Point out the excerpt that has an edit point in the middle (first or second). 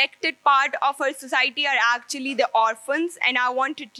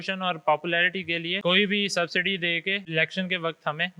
second